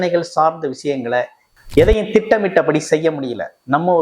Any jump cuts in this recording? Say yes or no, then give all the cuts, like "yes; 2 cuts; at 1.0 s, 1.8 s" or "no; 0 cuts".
yes; 1 cut; at 1.4 s